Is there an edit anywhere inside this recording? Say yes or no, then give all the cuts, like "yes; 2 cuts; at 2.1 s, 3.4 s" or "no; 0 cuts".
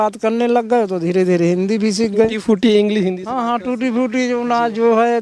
no; 0 cuts